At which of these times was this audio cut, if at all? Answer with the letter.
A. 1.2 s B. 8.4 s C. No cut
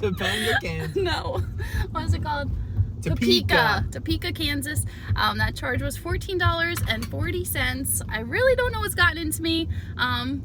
C